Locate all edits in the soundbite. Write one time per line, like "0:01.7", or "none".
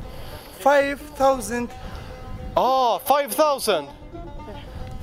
none